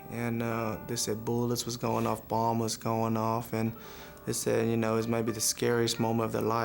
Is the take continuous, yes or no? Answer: yes